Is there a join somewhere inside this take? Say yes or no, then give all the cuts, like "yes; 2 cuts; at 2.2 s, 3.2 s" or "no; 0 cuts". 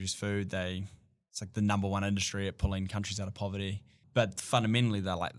yes; 1 cut; at 4.0 s